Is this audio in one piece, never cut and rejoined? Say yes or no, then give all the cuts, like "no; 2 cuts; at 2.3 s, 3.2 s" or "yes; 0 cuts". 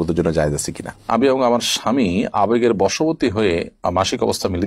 no; 1 cut; at 1.0 s